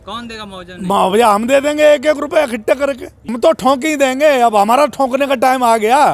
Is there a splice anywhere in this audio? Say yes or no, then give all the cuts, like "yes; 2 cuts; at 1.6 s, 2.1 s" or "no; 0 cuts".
yes; 1 cut; at 3.3 s